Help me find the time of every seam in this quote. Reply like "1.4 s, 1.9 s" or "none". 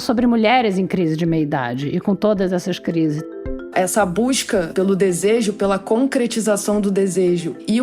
3.5 s, 4.7 s